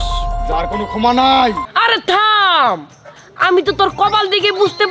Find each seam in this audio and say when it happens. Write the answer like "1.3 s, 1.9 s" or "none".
1.6 s